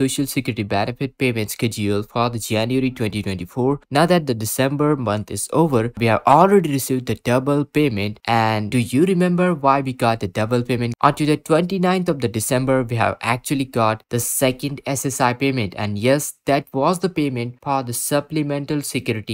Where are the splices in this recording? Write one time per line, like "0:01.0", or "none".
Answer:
0:06.0
0:08.6
0:10.9

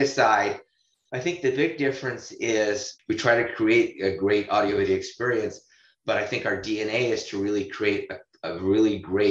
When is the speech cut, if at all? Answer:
0:02.9

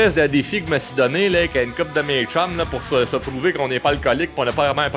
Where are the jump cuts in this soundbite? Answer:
none

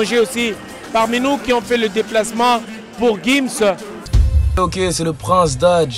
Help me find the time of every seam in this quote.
0:04.0

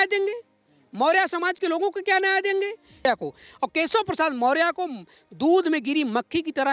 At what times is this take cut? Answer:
0:03.1

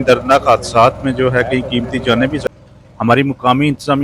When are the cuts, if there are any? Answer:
0:02.4

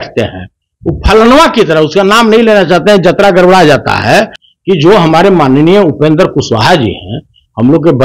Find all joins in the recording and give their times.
0:04.4

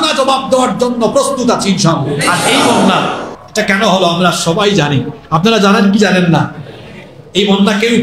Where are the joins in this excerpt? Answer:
0:02.5

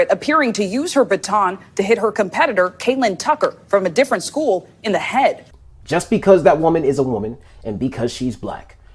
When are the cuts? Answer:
0:05.5

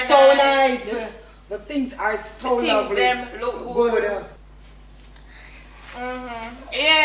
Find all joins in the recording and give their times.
none

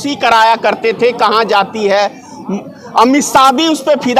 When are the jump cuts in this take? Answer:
none

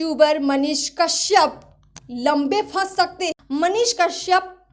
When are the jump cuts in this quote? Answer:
0:03.4

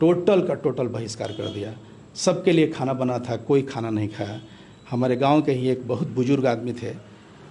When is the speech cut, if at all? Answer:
none

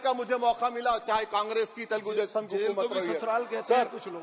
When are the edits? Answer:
none

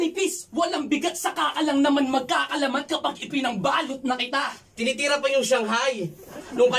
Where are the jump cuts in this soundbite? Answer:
0:04.6

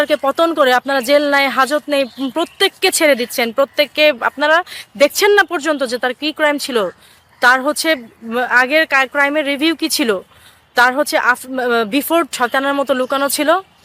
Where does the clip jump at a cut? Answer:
0:12.3

